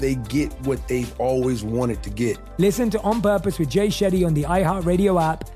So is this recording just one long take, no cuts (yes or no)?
no